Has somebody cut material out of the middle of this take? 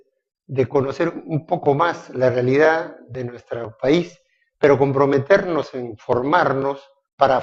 no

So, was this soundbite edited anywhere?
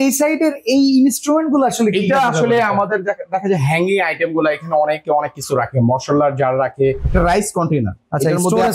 yes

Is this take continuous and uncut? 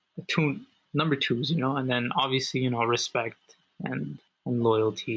no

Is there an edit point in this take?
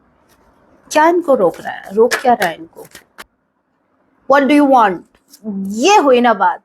yes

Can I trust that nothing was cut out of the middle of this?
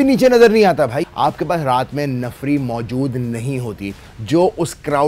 no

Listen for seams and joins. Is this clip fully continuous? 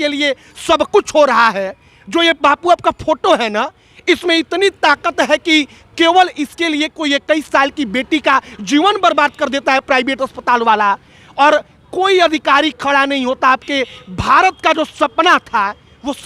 yes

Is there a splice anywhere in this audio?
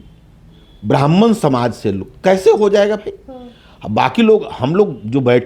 no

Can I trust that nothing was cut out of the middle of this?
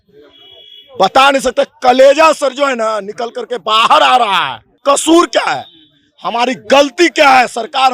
no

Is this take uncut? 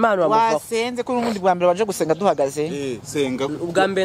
yes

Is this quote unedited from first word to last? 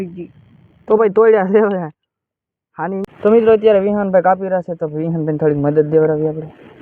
no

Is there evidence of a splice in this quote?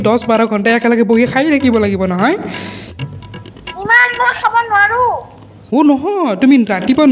no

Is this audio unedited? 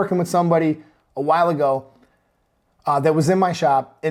yes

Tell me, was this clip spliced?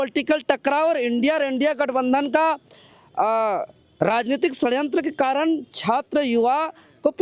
no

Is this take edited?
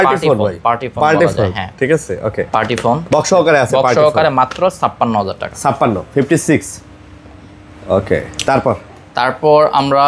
no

